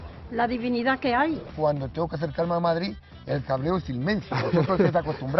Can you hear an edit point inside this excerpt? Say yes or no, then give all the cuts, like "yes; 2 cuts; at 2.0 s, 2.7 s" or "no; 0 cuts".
yes; 1 cut; at 1.5 s